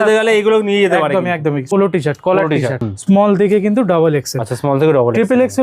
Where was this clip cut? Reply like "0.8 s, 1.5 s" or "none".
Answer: 1.7 s, 2.8 s